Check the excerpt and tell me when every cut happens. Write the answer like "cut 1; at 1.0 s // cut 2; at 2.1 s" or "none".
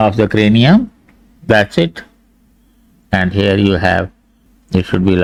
none

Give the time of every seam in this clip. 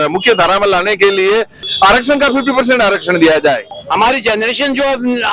cut 1; at 1.6 s // cut 2; at 3.7 s

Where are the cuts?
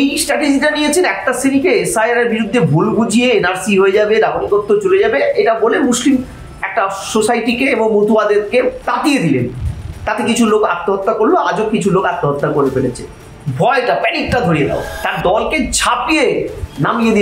cut 1; at 8.8 s // cut 2; at 14.9 s

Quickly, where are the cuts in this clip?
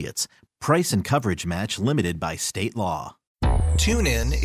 cut 1; at 3.2 s

